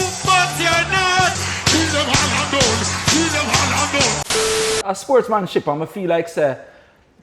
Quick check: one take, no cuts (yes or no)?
no